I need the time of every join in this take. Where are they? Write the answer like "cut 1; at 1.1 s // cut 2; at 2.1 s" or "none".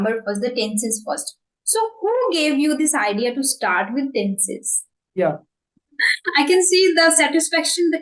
cut 1; at 4.9 s

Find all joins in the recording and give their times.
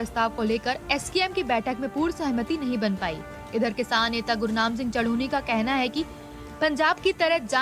cut 1; at 5.2 s

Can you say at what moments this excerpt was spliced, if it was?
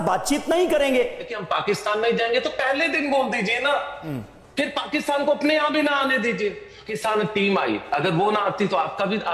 cut 1; at 1.4 s // cut 2; at 6.9 s

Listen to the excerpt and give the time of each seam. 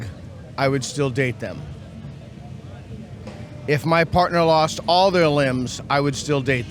cut 1; at 3.2 s

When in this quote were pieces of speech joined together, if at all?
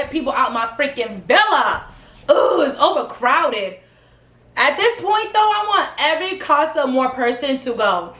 none

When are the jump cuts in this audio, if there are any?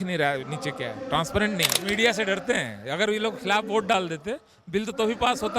cut 1; at 1.8 s

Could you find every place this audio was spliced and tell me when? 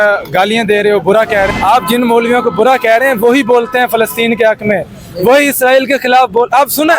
cut 1; at 1.5 s

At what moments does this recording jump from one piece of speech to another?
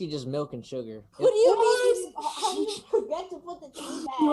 cut 1; at 1.0 s

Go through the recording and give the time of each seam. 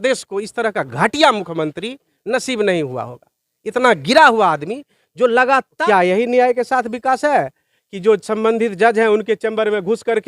cut 1; at 5.8 s

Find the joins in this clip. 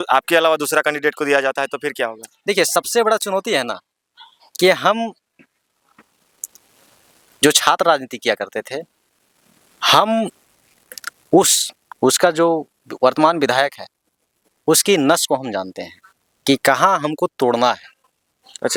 none

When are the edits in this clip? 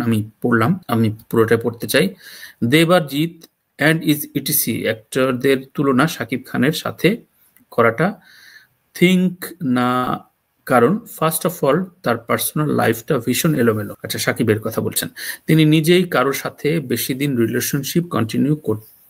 none

